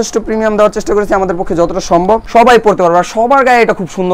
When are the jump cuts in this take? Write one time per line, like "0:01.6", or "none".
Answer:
0:02.2